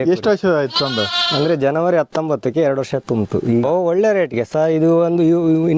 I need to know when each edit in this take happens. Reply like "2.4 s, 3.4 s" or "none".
3.6 s